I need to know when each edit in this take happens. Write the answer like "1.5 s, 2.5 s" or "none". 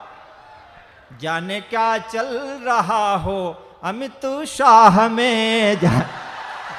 none